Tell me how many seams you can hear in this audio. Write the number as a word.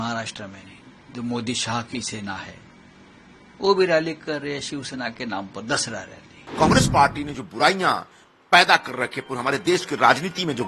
one